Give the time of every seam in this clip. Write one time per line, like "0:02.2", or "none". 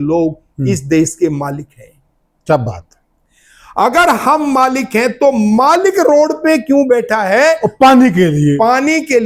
none